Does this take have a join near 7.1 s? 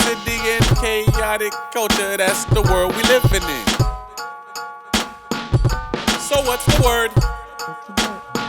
yes; 1 cut; at 7.1 s

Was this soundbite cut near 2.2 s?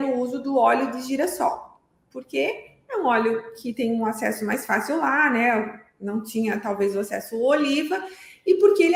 no; 0 cuts

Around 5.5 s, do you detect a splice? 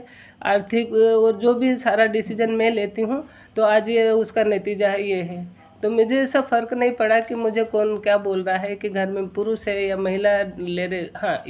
no; 0 cuts

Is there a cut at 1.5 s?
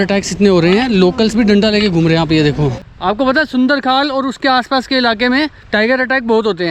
no; 2 cuts; at 2.9 s, 5.6 s

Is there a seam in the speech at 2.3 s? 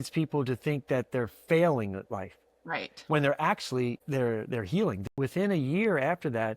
no; 1 cut; at 5.0 s

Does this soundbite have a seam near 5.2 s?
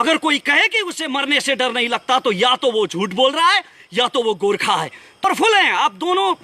yes; 1 cut; at 5.2 s

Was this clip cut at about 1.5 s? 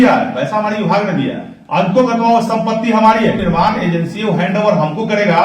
no; 1 cut; at 3.4 s

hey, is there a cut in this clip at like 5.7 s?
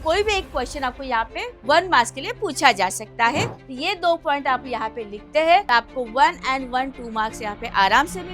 yes; 2 cuts; at 3.5 s, 5.7 s

